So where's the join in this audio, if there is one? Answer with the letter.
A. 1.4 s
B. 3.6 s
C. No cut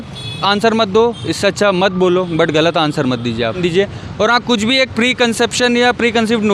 B